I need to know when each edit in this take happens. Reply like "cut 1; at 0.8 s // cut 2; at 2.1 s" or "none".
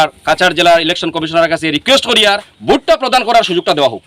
cut 1; at 2.5 s